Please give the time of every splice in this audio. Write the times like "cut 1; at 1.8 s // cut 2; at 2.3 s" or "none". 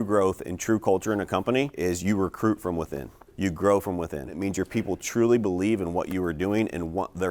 cut 1; at 1.7 s // cut 2; at 4.4 s